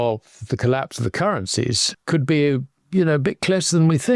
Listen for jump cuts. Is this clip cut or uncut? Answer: cut